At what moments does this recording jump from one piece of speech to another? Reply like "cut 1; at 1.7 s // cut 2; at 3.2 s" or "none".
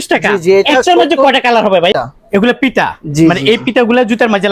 cut 1; at 1.9 s